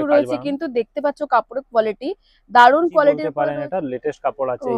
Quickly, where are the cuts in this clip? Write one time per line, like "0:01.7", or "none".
0:03.3